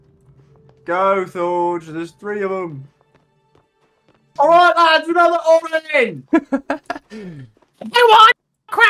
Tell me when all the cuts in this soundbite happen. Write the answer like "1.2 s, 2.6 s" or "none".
4.3 s